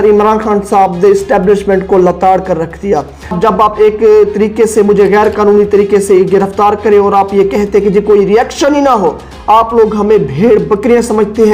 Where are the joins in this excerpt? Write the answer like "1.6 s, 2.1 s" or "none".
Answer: 3.4 s